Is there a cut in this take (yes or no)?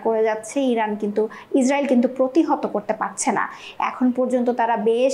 no